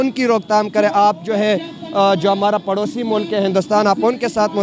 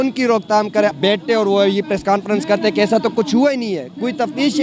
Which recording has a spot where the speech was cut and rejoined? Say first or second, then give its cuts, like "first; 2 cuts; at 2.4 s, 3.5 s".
second; 1 cut; at 0.9 s